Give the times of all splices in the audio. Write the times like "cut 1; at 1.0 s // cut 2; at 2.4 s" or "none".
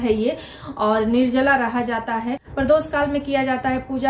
cut 1; at 2.4 s